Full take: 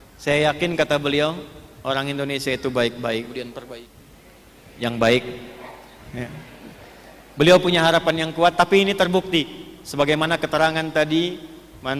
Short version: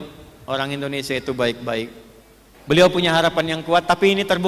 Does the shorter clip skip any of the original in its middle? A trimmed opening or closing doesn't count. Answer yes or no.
yes